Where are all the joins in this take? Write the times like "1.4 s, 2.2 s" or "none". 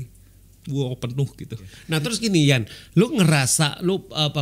1.7 s